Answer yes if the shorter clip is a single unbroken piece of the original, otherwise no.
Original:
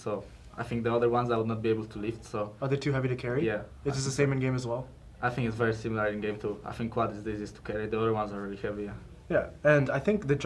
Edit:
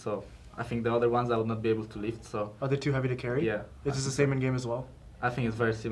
yes